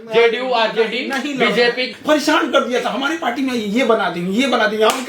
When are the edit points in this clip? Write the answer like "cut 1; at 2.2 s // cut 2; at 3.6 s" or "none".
cut 1; at 1.9 s